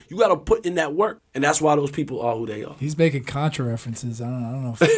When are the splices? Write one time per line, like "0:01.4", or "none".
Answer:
0:01.2